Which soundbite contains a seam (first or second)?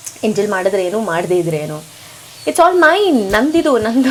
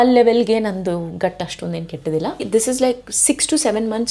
second